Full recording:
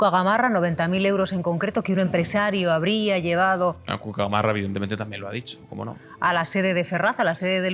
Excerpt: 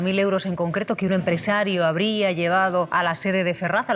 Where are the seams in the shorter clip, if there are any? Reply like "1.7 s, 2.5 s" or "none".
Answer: 2.9 s